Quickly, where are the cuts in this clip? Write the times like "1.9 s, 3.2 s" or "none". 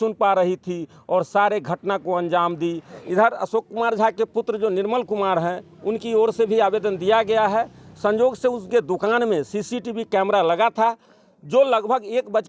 3.0 s